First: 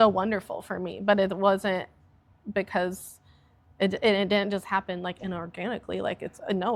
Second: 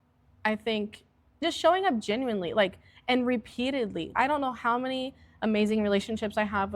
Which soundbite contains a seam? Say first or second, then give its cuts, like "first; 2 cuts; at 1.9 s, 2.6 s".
second; 2 cuts; at 1.4 s, 4.1 s